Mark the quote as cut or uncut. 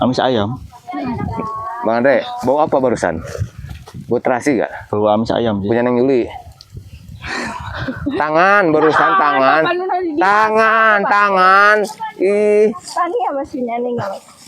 uncut